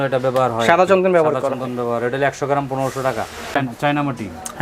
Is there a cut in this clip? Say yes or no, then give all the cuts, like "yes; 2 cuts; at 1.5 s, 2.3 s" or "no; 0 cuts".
no; 0 cuts